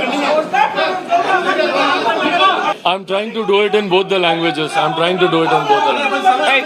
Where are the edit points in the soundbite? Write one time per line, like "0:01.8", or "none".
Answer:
0:02.8